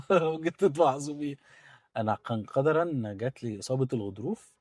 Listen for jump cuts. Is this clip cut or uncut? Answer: uncut